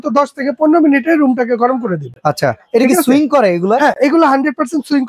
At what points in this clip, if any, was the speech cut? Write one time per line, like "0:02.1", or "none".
none